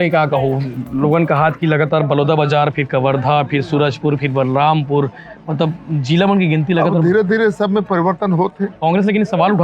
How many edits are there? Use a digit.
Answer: 1